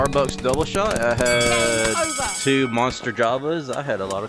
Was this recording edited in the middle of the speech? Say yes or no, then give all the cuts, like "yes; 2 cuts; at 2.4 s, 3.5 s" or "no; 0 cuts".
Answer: no; 0 cuts